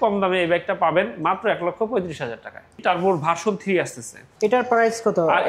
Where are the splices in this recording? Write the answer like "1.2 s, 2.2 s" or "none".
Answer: 2.8 s, 4.2 s